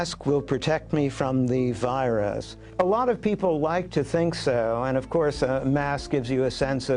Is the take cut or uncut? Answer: uncut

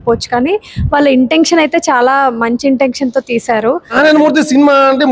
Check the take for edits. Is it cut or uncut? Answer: cut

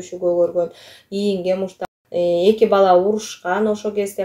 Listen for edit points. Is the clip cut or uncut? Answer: cut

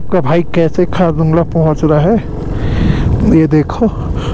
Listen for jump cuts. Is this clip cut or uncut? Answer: uncut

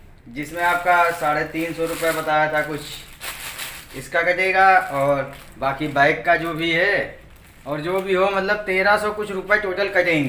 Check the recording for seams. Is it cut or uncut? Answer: uncut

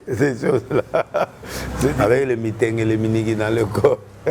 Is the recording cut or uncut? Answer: cut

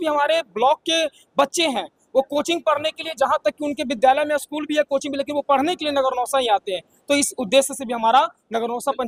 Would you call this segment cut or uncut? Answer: uncut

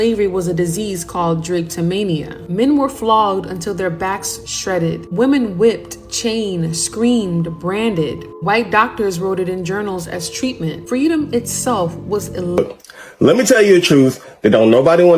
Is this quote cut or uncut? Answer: cut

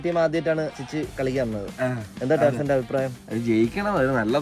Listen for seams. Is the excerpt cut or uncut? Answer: uncut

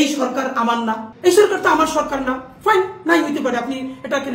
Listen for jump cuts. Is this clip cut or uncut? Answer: cut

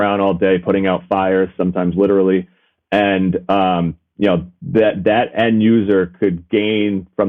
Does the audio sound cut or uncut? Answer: uncut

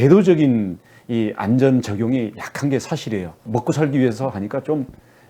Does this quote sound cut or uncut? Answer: cut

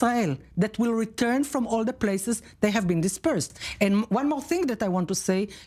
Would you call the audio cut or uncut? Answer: cut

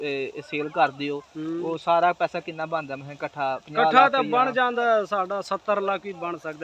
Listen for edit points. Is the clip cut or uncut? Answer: uncut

